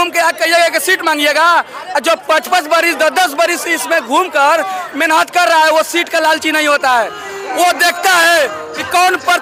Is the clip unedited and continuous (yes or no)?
yes